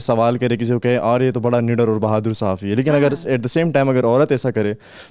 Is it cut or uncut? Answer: uncut